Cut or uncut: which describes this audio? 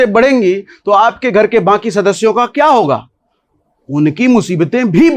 uncut